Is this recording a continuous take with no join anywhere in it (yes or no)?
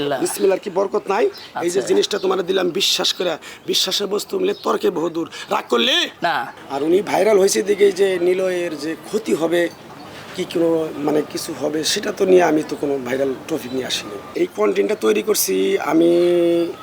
no